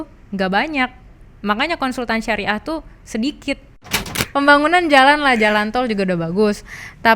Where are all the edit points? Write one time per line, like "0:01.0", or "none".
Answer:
0:03.9